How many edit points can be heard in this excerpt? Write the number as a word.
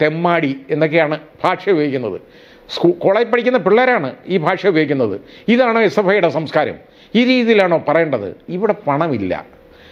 one